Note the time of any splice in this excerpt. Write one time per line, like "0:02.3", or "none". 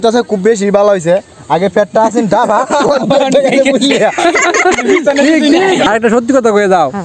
0:05.9